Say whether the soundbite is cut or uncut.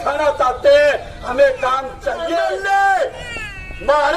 cut